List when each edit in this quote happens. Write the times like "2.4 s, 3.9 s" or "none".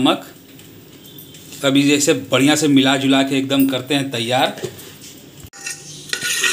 5.5 s